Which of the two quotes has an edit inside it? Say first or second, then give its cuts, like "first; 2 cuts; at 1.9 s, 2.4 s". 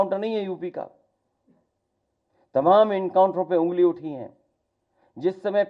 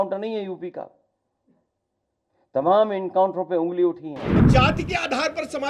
second; 1 cut; at 4.5 s